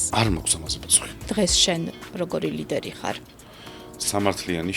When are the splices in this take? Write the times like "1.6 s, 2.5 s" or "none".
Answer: 1.3 s